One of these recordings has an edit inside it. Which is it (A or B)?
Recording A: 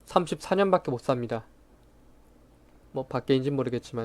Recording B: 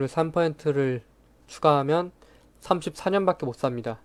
A